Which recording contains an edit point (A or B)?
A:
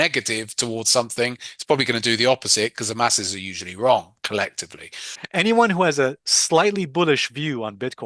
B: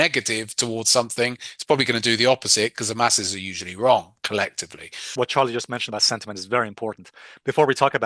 A